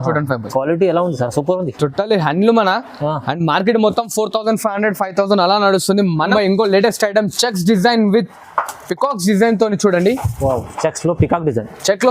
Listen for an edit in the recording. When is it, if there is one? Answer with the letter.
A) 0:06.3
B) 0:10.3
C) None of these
A